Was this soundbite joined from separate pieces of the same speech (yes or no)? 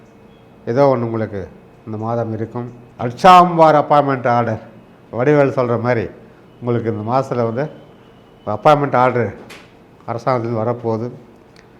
yes